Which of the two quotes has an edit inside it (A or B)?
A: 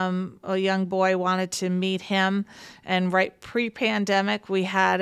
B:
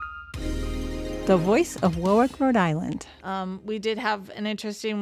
B